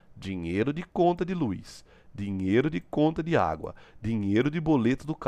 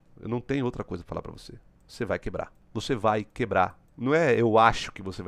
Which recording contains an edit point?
second; 2 cuts; at 2.6 s, 3.9 s

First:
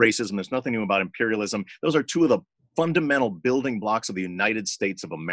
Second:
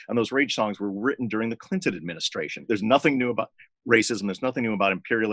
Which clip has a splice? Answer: second; 1 cut; at 2.7 s

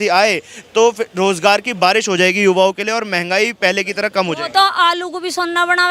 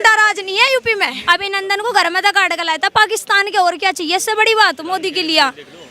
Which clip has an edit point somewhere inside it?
second; 1 cut; at 1.2 s

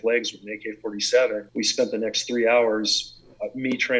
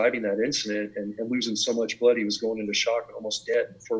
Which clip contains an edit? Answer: first; 1 cut; at 1.4 s

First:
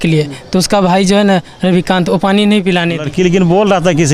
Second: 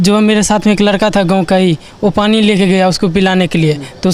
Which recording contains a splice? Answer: first; 1 cut; at 3.0 s

